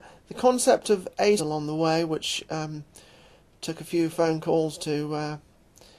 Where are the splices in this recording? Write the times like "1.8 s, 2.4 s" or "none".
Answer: none